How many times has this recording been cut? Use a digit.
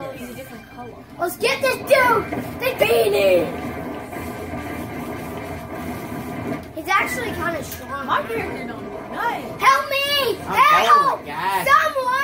1